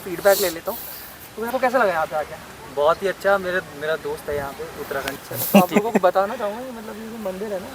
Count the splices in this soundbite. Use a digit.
2